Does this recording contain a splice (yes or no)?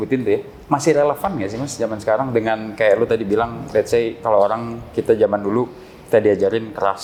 no